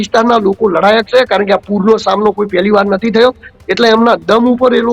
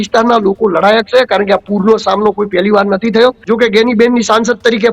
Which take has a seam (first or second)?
second